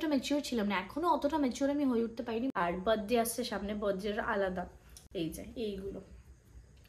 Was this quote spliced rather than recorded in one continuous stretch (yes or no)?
yes